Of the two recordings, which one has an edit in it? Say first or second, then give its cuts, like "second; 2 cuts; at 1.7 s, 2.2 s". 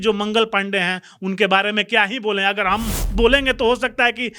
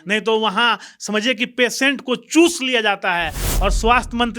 second; 1 cut; at 3.4 s